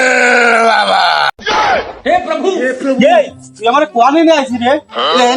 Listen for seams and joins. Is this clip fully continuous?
yes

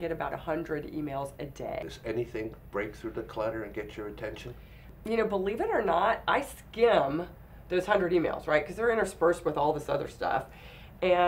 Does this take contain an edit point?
yes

